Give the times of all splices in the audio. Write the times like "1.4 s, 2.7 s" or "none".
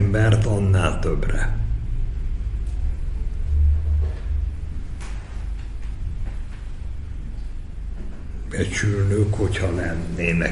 none